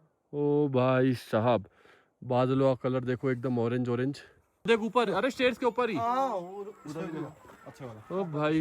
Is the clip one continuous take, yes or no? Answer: no